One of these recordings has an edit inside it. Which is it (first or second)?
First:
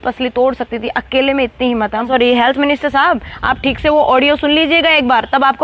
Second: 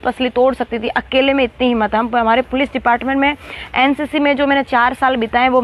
first